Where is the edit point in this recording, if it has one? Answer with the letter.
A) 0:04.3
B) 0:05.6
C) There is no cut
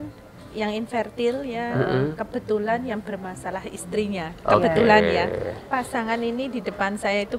B